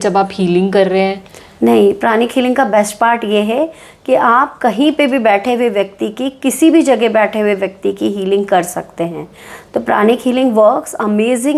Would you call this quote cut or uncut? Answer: uncut